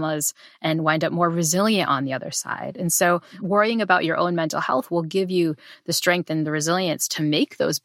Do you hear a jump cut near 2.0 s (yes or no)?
no